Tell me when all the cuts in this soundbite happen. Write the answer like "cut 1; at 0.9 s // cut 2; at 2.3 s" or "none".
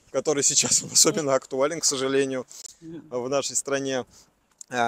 none